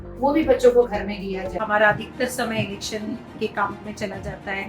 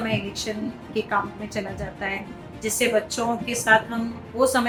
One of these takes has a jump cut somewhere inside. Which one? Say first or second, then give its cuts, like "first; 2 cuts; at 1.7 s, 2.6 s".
first; 1 cut; at 1.5 s